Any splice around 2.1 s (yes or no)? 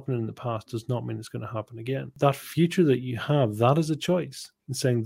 yes